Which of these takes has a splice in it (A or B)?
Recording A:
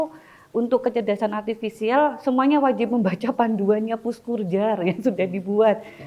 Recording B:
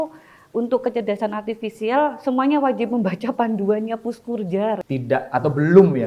B